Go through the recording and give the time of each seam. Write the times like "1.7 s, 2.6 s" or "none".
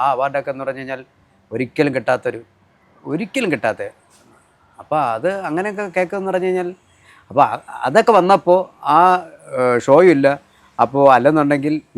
none